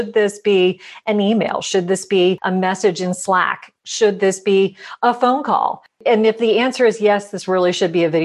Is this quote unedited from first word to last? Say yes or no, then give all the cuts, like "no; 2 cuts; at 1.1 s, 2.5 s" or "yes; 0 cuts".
yes; 0 cuts